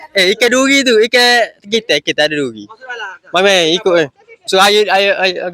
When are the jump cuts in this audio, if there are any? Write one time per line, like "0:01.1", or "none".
none